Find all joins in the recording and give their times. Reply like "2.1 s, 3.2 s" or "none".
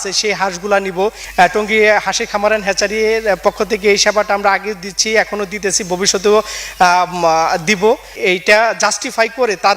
1.2 s, 8.1 s